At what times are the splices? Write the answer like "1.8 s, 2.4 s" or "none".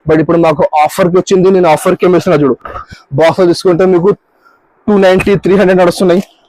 2.9 s